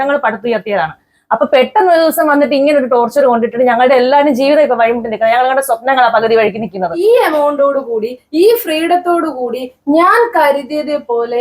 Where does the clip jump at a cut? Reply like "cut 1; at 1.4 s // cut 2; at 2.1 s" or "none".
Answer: cut 1; at 7.0 s